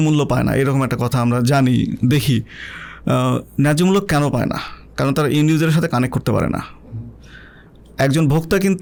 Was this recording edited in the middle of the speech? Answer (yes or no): no